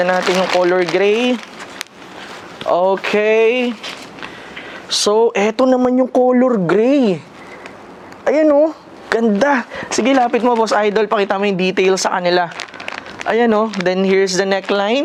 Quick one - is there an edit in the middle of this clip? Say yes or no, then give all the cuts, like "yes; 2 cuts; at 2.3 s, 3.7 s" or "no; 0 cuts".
no; 0 cuts